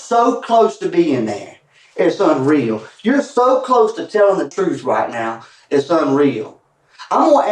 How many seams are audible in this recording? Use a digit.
1